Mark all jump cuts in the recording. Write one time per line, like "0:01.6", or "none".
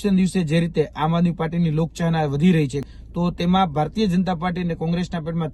0:02.8